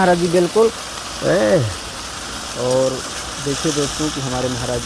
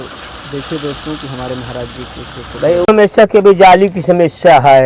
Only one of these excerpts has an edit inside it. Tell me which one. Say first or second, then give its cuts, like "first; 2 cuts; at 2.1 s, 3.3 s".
second; 1 cut; at 2.9 s